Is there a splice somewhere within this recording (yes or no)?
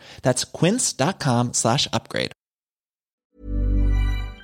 yes